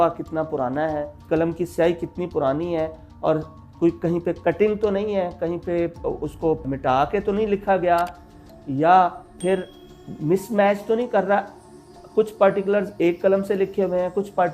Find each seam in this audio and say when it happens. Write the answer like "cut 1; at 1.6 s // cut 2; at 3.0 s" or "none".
cut 1; at 1.3 s